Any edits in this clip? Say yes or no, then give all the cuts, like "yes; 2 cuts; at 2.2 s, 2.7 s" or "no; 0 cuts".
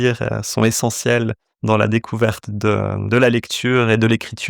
no; 0 cuts